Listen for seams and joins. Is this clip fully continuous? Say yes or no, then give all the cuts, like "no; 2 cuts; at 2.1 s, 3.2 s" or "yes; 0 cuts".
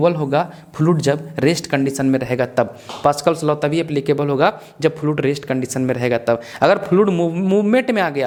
yes; 0 cuts